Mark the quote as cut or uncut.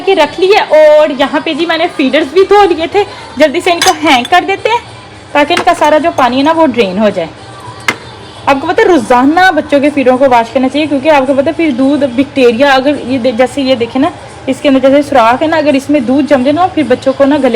uncut